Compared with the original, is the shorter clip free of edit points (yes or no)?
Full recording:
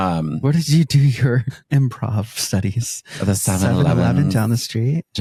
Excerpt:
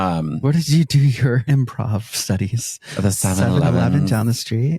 no